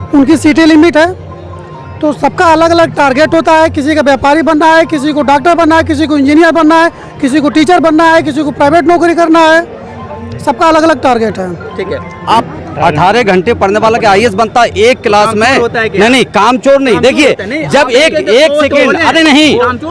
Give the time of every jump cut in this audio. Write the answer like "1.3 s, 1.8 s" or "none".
12.5 s